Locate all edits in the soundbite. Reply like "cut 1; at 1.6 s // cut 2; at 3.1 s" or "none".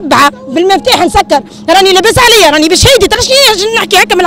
none